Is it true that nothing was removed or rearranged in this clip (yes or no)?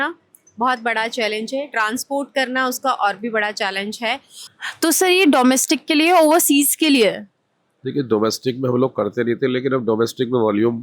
no